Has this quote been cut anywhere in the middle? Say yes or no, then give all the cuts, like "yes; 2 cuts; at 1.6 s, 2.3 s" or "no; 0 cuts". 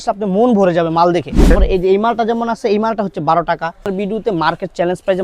yes; 2 cuts; at 1.5 s, 3.9 s